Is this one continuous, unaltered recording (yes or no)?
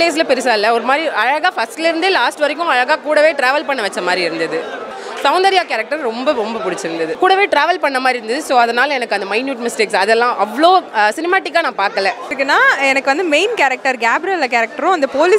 no